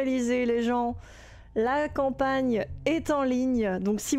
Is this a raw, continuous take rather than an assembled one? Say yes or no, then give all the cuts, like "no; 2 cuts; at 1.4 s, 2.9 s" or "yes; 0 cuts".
yes; 0 cuts